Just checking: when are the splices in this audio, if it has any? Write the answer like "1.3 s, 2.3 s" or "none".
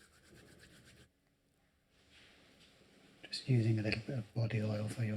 1.1 s